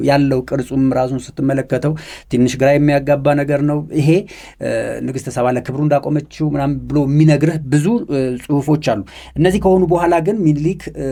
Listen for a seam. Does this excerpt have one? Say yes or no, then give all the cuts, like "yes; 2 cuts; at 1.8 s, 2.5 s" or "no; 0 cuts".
no; 0 cuts